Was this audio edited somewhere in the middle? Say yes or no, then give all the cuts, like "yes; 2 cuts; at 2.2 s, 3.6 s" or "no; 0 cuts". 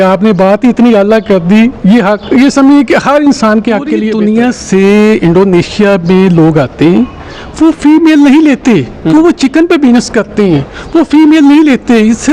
yes; 1 cut; at 4.1 s